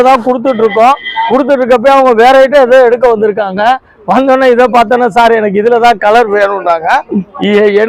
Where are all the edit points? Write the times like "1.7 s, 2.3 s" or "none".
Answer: none